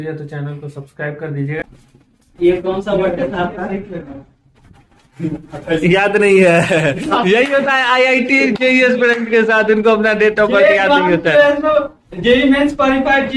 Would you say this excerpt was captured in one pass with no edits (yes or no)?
no